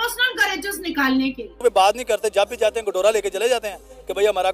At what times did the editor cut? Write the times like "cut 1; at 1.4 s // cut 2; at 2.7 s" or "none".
cut 1; at 1.5 s

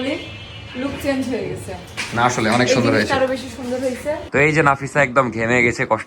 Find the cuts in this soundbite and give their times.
cut 1; at 4.2 s

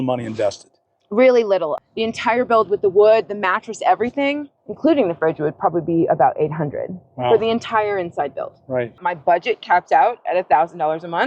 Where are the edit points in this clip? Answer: cut 1; at 1.7 s // cut 2; at 4.5 s // cut 3; at 9.0 s

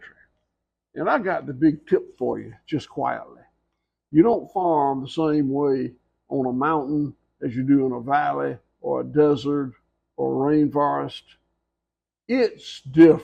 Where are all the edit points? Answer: none

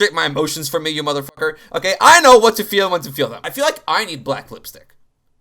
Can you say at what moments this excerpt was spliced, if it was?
cut 1; at 3.4 s

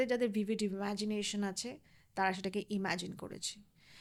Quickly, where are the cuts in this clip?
none

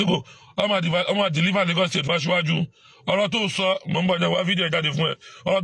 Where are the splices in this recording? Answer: none

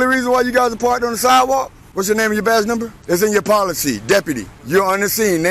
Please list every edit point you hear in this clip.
cut 1; at 1.8 s // cut 2; at 3.0 s // cut 3; at 4.5 s

